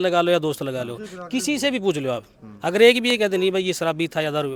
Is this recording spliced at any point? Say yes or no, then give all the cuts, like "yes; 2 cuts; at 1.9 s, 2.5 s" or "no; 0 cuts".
no; 0 cuts